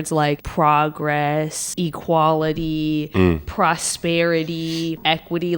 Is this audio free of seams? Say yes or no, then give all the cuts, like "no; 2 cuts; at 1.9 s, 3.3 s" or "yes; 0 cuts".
yes; 0 cuts